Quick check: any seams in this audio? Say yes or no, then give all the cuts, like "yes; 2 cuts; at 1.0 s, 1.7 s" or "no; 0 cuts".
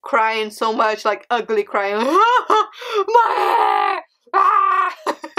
no; 0 cuts